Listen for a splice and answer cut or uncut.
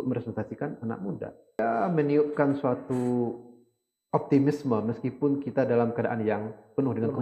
cut